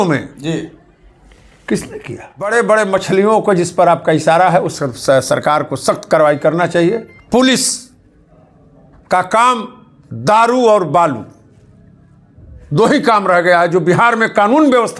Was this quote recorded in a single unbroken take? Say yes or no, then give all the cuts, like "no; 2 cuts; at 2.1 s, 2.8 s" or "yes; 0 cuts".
no; 2 cuts; at 2.5 s, 7.1 s